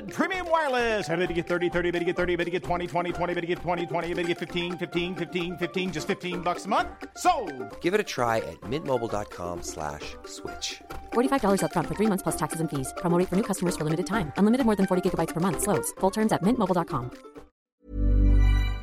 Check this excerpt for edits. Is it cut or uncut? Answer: cut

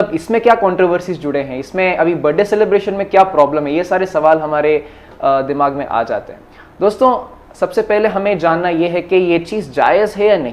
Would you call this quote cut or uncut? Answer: uncut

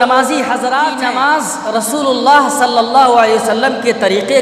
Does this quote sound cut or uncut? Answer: cut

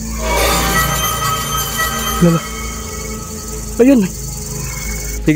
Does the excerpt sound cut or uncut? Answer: uncut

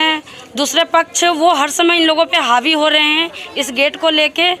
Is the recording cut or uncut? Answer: uncut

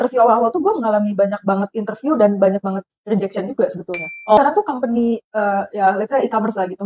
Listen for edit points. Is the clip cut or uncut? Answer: cut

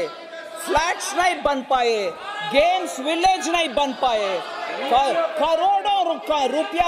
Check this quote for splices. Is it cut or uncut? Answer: uncut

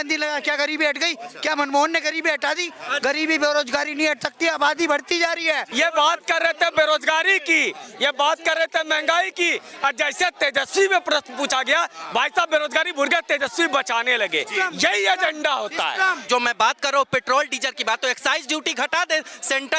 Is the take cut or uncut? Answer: cut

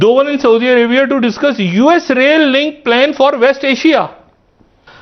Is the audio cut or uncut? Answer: uncut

